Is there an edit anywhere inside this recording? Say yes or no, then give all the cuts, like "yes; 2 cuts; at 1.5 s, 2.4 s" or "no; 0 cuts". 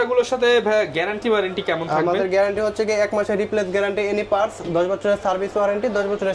no; 0 cuts